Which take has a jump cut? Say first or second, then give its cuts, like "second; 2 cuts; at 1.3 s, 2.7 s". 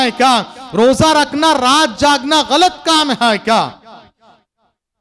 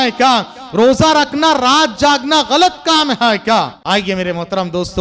second; 1 cut; at 3.8 s